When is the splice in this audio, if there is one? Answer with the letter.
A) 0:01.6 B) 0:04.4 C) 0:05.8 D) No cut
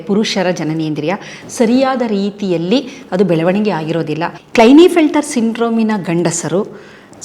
B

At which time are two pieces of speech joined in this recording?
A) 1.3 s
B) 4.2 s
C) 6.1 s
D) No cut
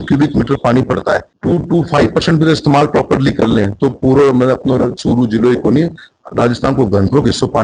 A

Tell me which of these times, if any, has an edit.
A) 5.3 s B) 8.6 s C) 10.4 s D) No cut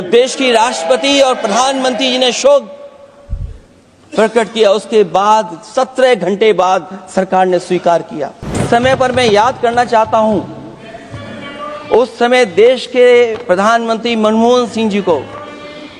B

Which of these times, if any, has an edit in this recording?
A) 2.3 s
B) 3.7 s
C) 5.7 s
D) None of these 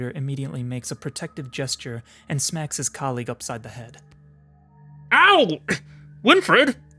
D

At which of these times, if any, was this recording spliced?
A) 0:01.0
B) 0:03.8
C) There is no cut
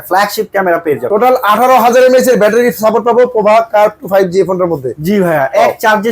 A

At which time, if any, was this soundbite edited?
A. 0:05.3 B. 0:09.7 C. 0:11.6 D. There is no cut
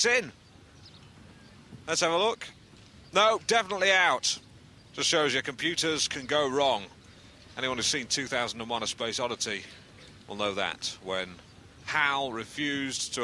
D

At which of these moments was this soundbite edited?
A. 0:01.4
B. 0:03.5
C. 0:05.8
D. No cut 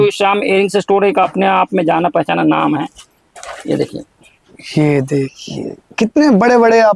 D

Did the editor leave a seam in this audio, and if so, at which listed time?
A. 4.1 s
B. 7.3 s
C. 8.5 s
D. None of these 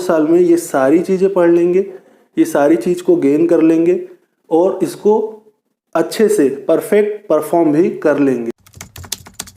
C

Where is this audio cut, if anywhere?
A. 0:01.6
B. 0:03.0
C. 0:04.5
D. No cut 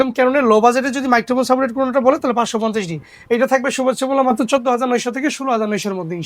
D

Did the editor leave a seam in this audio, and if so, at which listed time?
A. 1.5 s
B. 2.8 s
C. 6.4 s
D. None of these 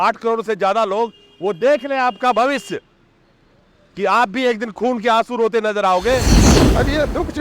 C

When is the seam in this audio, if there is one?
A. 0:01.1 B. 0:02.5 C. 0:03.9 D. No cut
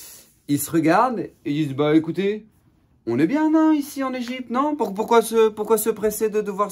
D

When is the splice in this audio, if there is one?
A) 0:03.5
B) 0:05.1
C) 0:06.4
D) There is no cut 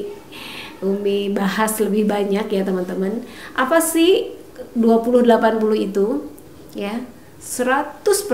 D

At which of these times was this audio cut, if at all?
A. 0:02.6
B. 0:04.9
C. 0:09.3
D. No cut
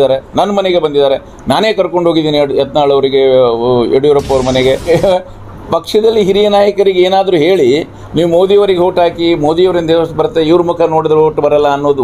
B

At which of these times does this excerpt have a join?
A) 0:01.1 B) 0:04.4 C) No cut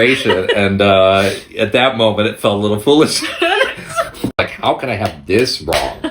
B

